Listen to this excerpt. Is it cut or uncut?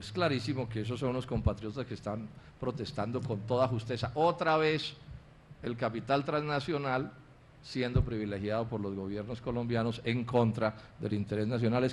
uncut